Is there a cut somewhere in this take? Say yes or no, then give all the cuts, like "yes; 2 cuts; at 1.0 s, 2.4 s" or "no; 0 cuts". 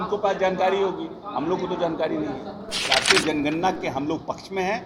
yes; 1 cut; at 2.8 s